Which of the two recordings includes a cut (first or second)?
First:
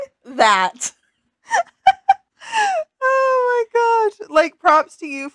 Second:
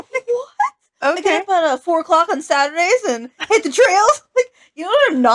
first